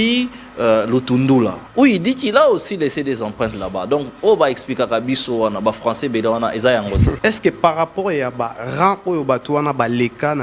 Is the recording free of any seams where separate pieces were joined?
no; 2 cuts; at 1.6 s, 7.2 s

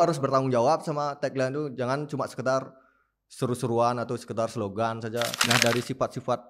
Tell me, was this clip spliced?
yes; 1 cut; at 5.4 s

